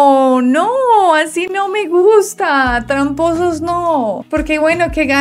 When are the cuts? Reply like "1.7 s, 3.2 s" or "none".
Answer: none